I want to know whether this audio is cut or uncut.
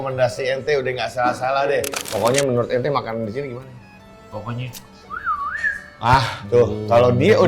cut